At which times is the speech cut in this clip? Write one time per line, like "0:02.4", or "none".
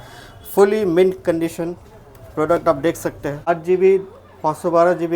0:03.5